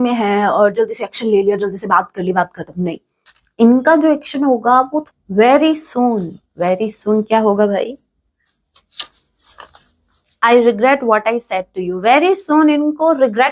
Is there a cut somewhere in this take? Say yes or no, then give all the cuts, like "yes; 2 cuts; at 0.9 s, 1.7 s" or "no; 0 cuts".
yes; 1 cut; at 5.0 s